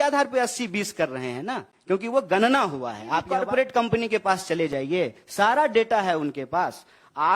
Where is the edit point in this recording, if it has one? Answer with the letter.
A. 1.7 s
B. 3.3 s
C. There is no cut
B